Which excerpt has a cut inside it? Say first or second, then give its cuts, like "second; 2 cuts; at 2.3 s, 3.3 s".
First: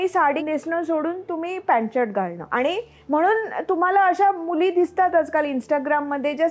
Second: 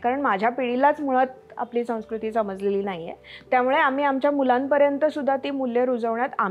first; 1 cut; at 2.4 s